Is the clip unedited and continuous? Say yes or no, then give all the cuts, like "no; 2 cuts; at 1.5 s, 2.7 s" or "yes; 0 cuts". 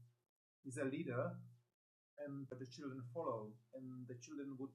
no; 1 cut; at 2.5 s